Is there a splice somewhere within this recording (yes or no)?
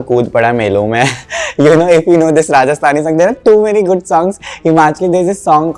no